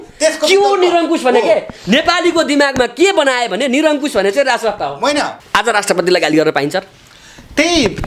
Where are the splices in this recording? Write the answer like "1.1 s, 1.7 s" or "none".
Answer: 5.3 s